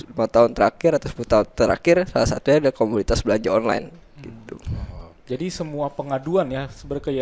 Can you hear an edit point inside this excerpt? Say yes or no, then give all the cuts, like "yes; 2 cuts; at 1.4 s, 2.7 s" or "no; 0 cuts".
no; 0 cuts